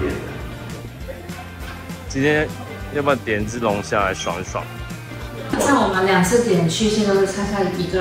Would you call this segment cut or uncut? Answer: cut